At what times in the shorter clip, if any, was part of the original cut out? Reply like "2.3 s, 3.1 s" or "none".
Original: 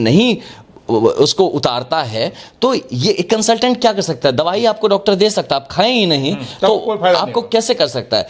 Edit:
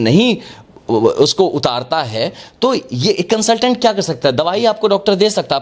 none